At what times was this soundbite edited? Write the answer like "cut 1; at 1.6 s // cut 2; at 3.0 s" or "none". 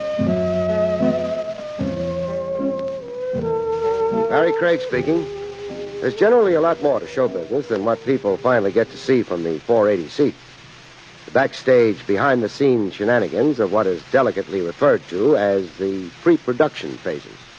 cut 1; at 9.4 s